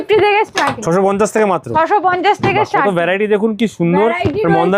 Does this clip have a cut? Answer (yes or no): no